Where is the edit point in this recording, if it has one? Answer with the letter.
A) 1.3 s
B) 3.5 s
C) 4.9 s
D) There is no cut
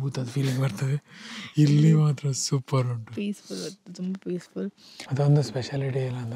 C